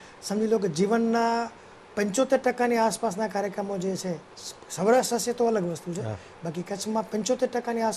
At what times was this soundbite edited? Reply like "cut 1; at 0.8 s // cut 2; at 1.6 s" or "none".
none